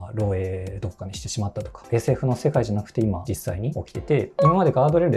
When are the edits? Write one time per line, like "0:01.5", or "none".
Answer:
0:01.8
0:04.3